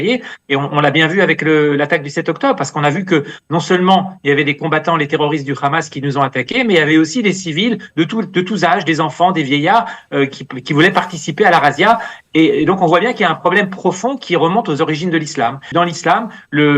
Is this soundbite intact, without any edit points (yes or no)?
no